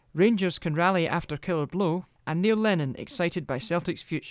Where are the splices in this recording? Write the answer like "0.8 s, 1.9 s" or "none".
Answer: 2.1 s